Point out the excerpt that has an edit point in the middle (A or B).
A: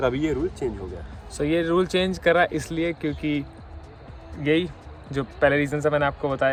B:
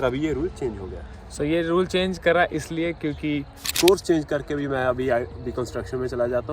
B